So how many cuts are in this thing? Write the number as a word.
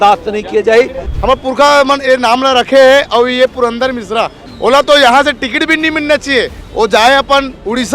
two